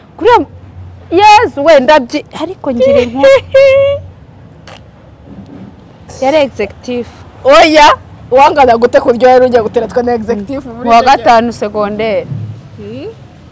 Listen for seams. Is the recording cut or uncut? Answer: uncut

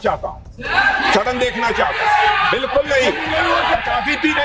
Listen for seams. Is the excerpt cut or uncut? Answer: uncut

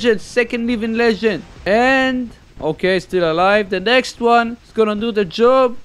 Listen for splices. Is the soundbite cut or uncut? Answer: cut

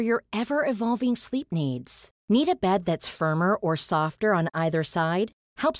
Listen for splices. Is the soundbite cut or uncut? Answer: uncut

